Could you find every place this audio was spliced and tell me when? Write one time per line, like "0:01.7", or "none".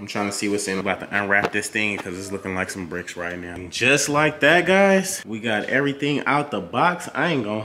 0:00.8
0:03.7
0:05.2